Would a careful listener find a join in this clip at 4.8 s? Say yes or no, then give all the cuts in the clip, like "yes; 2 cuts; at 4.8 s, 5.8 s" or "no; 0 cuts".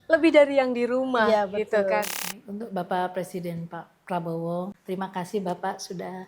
yes; 2 cuts; at 2.2 s, 4.8 s